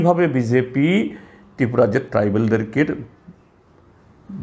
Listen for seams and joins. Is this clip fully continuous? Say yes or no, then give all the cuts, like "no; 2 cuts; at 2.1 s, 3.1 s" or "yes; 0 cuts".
yes; 0 cuts